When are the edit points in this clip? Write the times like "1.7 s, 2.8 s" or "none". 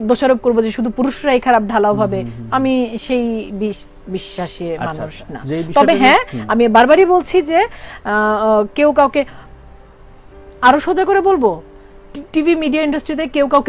none